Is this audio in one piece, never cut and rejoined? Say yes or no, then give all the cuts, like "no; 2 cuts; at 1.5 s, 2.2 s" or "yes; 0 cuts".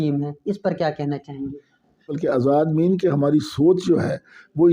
no; 1 cut; at 2.2 s